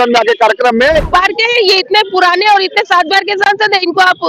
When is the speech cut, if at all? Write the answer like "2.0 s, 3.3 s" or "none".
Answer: 1.1 s